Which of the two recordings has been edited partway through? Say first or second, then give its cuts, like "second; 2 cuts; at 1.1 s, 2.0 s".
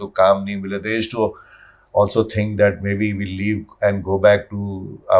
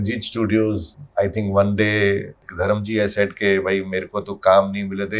second; 2 cuts; at 0.9 s, 2.5 s